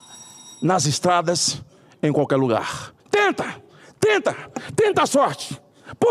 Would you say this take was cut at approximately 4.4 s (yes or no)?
no